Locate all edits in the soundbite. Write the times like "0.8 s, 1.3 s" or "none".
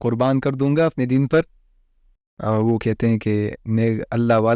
2.1 s